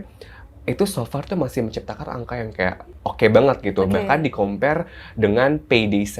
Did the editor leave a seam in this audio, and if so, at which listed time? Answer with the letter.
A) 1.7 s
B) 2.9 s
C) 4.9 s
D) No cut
B